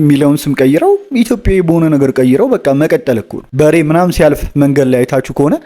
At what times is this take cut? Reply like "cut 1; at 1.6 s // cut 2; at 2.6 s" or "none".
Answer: cut 1; at 3.4 s